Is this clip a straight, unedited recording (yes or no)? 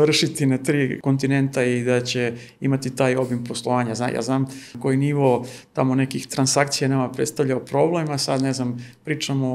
no